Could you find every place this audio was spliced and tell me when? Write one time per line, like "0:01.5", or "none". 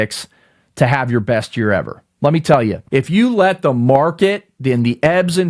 0:02.8